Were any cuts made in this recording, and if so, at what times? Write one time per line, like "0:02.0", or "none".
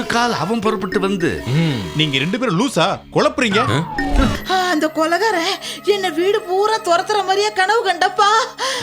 0:04.4

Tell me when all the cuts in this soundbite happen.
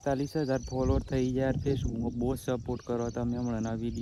none

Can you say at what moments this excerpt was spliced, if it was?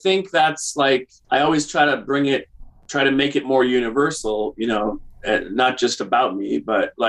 0:01.1

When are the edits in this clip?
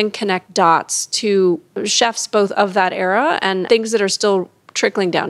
0:01.8
0:03.6

